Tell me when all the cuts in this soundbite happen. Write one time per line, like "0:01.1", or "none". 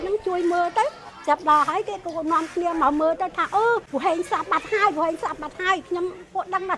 0:03.9